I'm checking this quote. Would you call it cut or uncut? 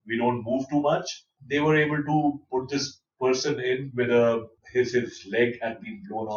cut